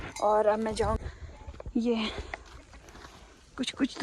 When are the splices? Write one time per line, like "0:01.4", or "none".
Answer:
0:01.0